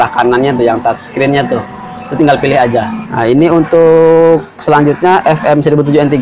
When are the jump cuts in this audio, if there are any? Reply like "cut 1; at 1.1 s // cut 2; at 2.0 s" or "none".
cut 1; at 3.0 s